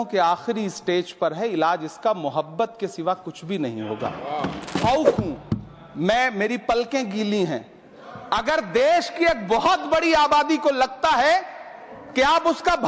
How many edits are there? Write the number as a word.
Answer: one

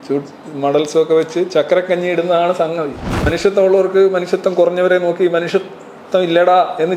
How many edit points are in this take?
one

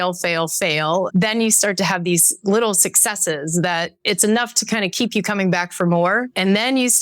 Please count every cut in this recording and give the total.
one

